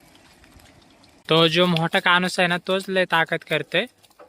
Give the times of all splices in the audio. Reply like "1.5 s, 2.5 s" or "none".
1.2 s